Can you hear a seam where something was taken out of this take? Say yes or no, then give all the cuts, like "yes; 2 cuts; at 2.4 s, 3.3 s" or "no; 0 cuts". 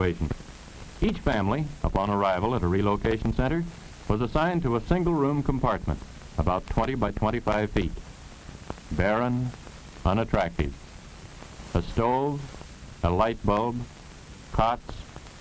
no; 0 cuts